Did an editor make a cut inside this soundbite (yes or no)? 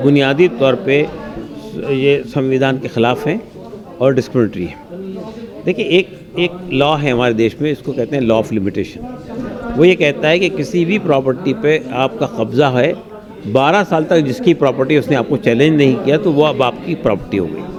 no